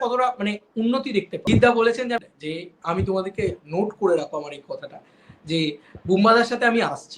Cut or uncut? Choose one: cut